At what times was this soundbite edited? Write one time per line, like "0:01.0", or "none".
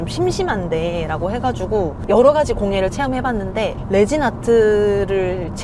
0:02.0